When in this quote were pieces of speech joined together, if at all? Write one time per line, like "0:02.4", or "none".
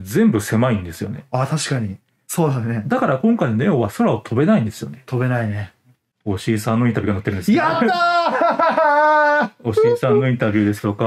0:02.2
0:06.1

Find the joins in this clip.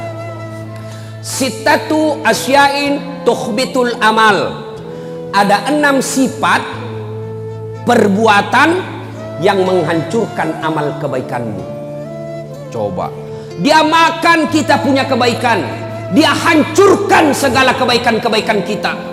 none

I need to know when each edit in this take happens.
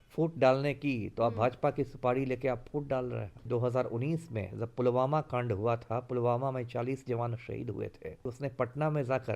0:03.5
0:08.3

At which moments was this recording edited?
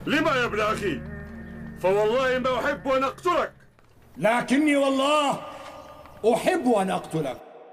none

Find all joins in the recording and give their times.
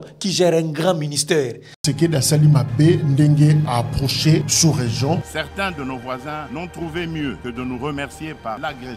0:01.8

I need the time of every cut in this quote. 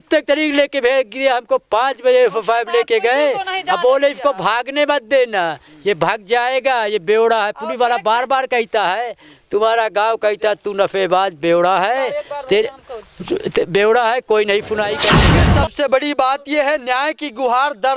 0:15.2

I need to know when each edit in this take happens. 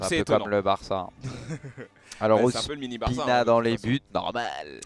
none

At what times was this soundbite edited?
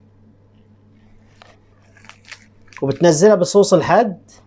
none

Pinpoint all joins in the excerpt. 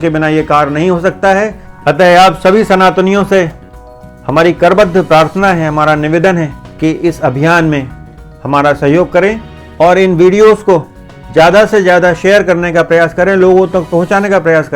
0:01.7

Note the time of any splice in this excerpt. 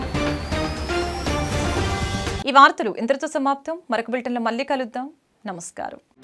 none

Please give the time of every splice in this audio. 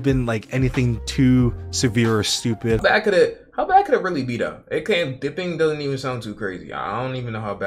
0:02.8

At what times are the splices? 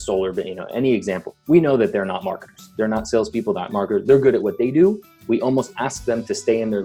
none

